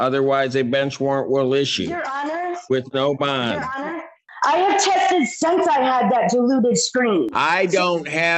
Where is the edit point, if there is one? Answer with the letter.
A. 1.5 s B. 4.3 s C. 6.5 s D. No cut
B